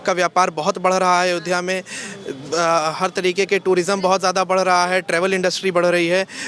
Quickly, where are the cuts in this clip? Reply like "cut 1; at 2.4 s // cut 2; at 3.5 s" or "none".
none